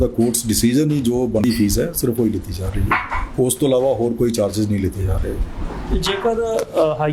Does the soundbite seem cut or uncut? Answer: cut